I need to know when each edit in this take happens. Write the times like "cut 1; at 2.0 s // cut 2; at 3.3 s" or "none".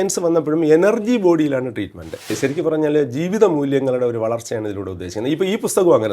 cut 1; at 2.3 s

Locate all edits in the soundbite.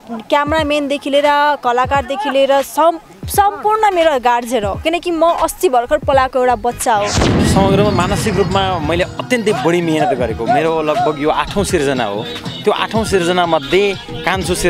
cut 1; at 7.3 s

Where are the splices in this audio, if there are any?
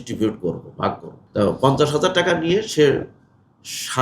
cut 1; at 1.1 s

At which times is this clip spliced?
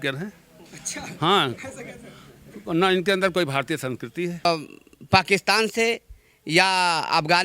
cut 1; at 4.5 s

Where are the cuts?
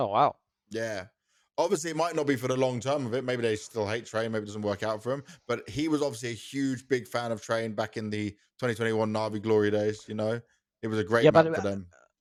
none

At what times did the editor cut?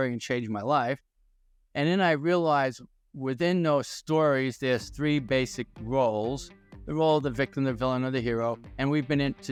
none

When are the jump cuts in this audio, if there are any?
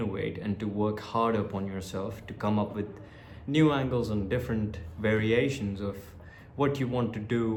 none

